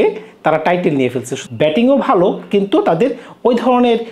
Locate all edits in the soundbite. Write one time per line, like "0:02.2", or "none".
0:01.3

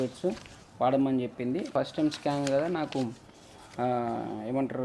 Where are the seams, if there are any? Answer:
0:01.7

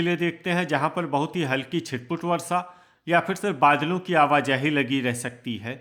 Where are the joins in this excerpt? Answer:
none

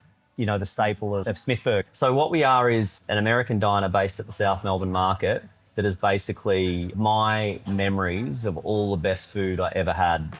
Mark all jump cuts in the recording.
0:01.6
0:03.0
0:06.9

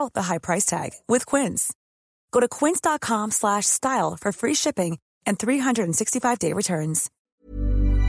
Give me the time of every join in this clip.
0:07.1

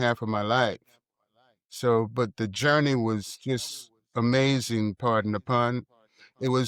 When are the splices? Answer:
none

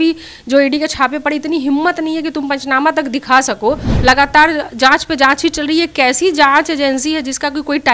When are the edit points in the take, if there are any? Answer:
0:03.9

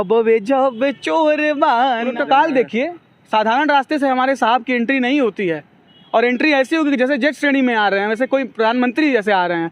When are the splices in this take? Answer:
0:02.1

